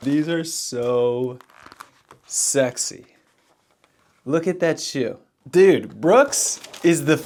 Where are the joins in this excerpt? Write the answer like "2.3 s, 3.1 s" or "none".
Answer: none